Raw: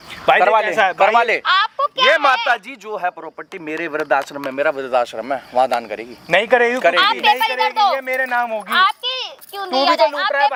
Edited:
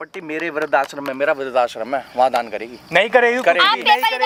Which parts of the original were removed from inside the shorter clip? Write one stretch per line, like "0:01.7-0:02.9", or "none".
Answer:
none